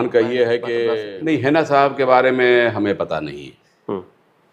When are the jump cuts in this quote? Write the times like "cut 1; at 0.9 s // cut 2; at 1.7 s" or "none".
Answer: cut 1; at 1.1 s